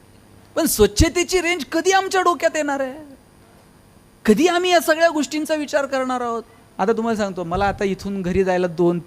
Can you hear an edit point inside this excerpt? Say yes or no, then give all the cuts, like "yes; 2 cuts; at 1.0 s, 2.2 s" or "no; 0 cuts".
yes; 1 cut; at 6.6 s